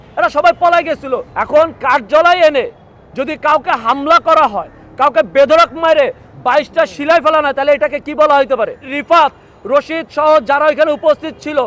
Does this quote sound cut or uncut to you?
cut